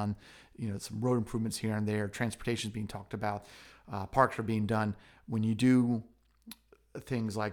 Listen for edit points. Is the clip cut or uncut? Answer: uncut